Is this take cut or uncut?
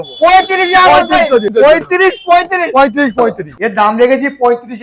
cut